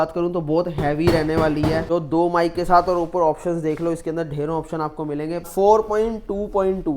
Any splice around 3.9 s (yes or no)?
no